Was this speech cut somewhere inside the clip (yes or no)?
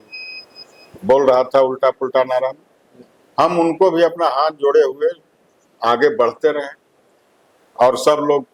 no